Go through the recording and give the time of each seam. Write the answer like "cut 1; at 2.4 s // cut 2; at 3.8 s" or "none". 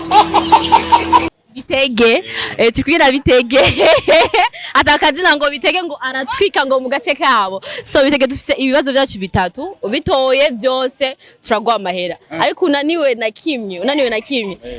none